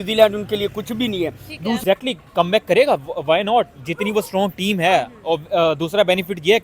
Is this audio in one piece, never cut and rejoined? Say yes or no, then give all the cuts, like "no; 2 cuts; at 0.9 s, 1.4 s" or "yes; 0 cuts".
no; 1 cut; at 1.8 s